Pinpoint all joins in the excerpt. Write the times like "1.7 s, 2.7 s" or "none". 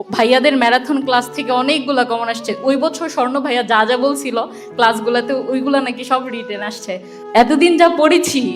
7.1 s